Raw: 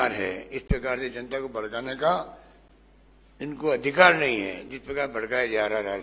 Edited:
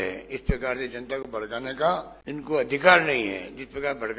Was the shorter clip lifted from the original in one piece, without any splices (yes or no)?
no